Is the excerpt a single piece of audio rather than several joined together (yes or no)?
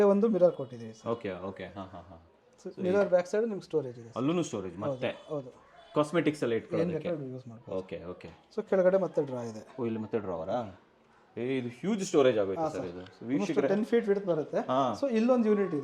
yes